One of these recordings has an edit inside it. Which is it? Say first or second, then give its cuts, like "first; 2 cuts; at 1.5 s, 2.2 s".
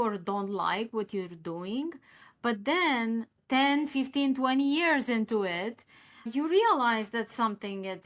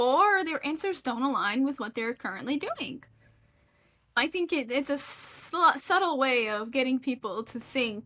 second; 1 cut; at 4.2 s